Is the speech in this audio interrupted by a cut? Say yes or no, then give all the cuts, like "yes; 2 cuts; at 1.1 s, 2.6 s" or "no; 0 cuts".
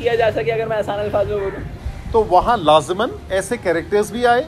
yes; 1 cut; at 1.7 s